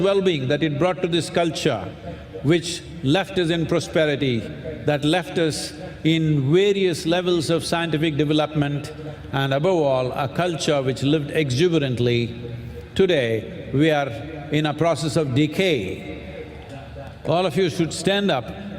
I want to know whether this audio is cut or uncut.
cut